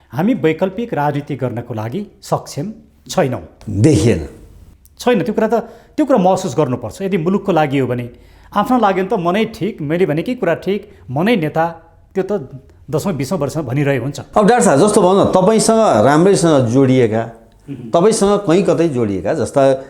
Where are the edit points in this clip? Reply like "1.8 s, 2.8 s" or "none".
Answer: none